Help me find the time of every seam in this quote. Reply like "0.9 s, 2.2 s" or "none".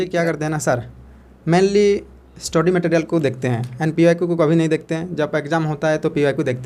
none